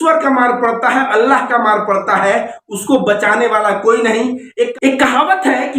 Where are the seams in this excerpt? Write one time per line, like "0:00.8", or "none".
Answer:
0:04.7